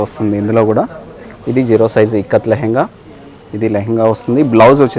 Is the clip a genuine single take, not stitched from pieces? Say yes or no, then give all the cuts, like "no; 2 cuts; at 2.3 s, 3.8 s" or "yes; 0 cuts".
yes; 0 cuts